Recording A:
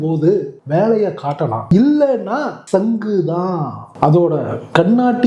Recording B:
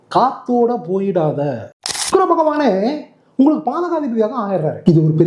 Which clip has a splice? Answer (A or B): B